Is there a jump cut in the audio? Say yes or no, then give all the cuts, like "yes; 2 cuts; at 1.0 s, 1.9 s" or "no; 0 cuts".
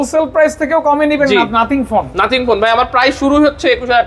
no; 0 cuts